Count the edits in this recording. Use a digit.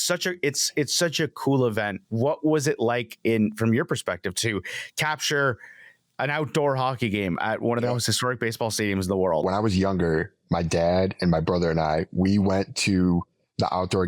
1